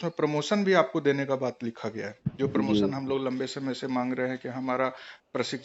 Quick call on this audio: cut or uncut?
uncut